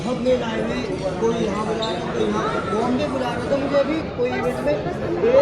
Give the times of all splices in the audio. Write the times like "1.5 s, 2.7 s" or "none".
none

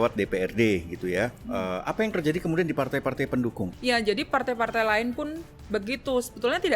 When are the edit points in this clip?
3.7 s

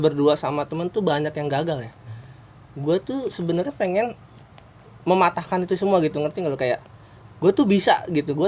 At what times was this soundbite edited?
none

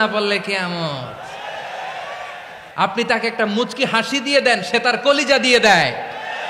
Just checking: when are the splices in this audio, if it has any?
2.6 s

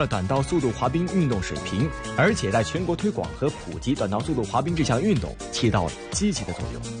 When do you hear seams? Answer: 1.3 s

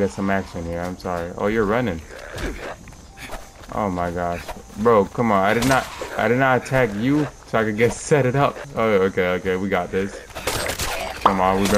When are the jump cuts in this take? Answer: 8.6 s

